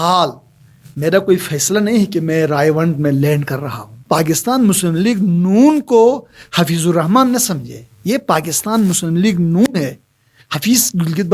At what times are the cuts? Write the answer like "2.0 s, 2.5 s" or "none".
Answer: 4.0 s